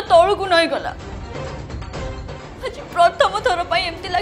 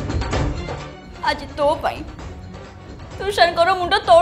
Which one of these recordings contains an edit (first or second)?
first